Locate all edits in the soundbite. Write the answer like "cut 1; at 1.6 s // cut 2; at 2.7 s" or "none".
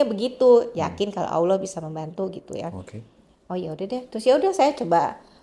none

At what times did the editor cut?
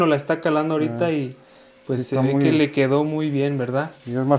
none

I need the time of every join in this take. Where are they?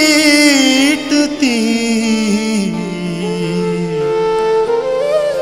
none

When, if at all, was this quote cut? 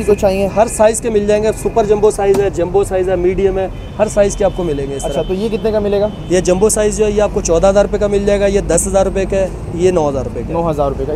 none

